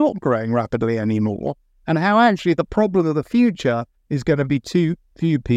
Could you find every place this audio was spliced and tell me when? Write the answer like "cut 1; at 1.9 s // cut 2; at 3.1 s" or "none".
none